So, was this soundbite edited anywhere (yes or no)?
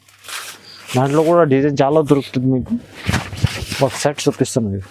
no